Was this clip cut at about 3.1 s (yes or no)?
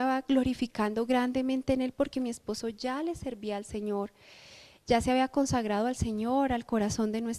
no